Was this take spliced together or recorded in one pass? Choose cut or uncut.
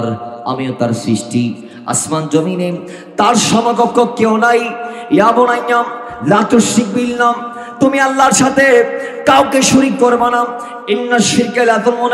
uncut